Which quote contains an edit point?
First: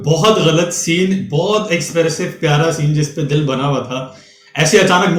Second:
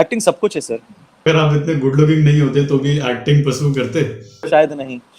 second; 2 cuts; at 1.3 s, 4.4 s

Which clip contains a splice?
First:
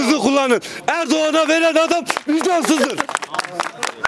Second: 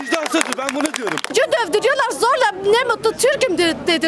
second; 1 cut; at 1.3 s

